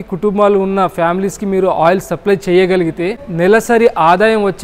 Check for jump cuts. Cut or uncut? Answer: cut